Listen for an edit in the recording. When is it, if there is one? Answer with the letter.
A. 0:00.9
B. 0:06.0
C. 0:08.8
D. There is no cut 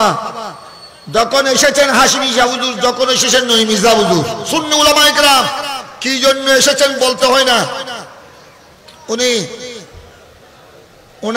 D